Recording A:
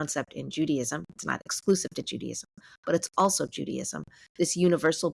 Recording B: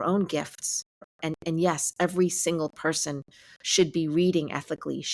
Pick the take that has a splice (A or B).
B